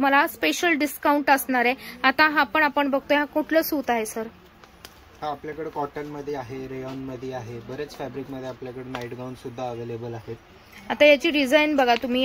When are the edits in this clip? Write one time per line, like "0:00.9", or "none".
none